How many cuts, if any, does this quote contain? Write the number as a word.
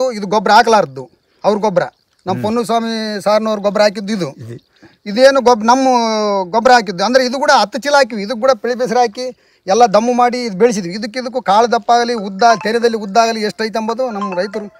zero